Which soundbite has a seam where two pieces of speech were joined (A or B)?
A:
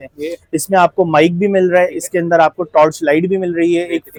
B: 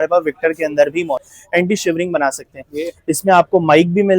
B